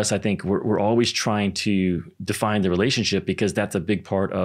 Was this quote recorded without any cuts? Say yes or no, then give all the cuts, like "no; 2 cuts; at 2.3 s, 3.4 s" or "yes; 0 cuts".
yes; 0 cuts